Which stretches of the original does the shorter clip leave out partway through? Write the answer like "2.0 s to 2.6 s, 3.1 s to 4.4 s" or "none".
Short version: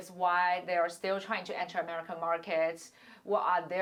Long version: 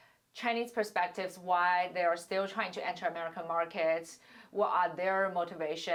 none